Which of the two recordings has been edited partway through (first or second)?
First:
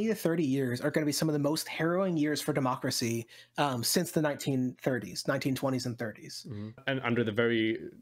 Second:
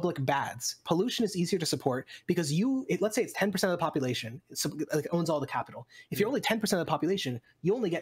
first